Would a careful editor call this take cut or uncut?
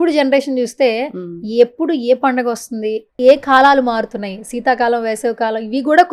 uncut